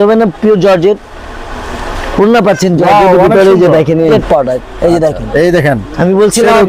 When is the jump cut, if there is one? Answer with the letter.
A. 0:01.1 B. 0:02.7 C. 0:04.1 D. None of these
C